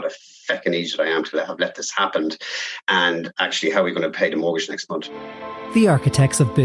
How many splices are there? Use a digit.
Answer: 1